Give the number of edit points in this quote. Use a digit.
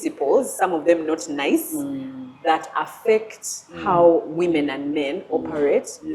0